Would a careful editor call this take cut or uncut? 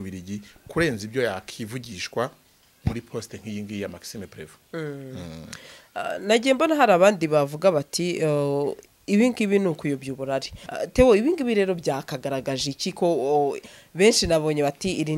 cut